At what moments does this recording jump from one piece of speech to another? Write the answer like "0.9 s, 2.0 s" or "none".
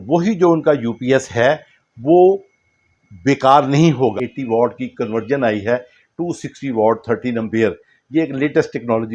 4.1 s